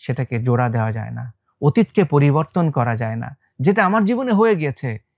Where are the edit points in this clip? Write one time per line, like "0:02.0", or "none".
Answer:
none